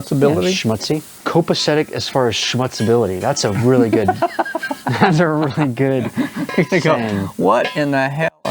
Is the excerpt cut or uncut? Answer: cut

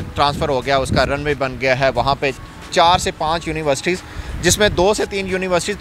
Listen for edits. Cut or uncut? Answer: uncut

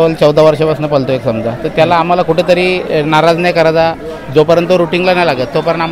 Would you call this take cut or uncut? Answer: uncut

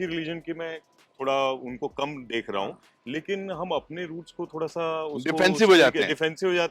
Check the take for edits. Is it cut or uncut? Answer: uncut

